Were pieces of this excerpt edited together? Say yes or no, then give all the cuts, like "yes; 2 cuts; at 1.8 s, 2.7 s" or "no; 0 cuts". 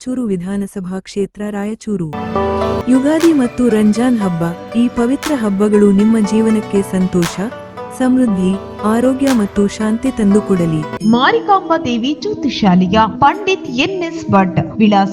yes; 2 cuts; at 2.1 s, 11.0 s